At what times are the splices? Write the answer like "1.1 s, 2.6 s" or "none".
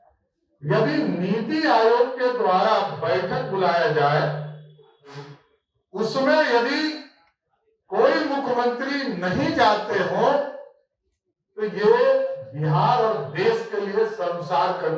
none